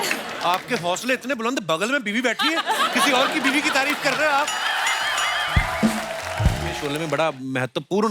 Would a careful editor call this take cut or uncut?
cut